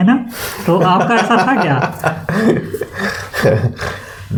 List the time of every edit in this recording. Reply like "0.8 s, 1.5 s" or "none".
none